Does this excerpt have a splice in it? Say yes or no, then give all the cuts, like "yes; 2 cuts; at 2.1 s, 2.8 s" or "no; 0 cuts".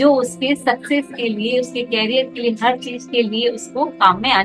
no; 0 cuts